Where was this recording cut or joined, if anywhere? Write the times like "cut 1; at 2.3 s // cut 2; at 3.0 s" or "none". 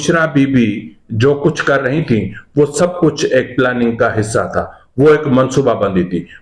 none